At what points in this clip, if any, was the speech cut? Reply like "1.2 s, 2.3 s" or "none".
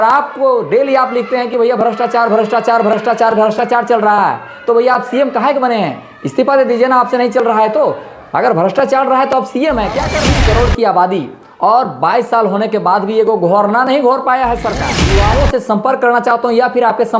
10.2 s, 15.1 s